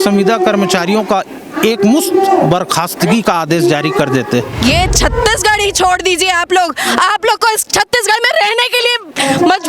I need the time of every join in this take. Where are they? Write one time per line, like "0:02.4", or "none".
0:04.5